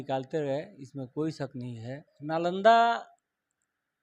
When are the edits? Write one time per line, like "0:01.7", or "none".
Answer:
0:02.1